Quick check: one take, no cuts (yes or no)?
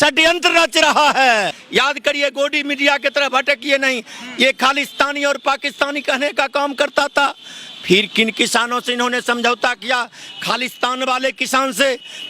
no